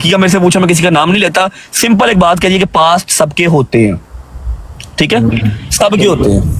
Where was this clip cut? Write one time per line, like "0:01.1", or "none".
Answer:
none